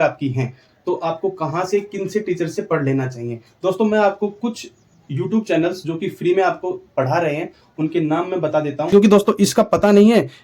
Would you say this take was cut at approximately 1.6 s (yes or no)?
no